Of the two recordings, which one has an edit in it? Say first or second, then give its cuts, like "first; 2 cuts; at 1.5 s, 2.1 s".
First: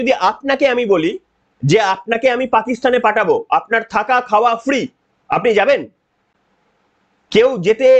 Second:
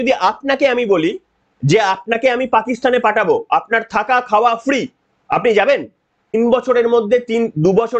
second; 1 cut; at 6.2 s